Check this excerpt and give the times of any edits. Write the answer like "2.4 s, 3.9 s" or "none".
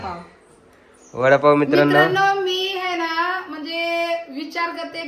none